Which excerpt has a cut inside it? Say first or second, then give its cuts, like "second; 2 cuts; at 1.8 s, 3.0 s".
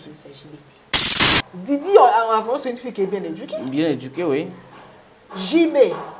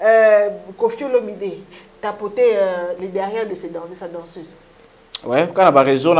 first; 1 cut; at 1.2 s